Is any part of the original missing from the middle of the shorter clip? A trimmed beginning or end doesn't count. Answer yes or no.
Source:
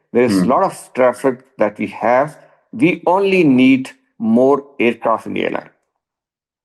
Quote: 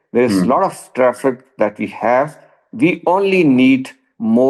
no